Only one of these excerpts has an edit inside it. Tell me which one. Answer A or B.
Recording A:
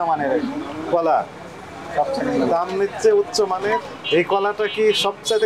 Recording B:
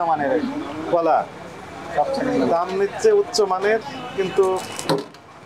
A